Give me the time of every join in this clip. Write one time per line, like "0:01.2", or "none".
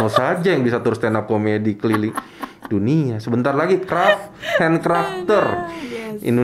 none